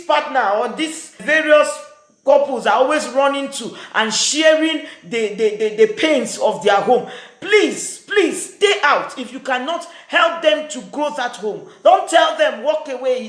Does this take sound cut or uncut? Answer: cut